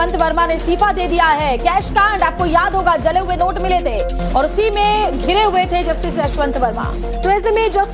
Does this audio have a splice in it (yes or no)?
no